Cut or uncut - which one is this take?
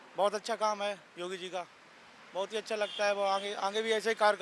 uncut